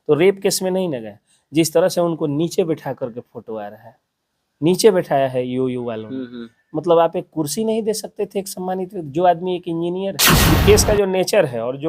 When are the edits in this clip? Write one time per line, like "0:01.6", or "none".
0:10.3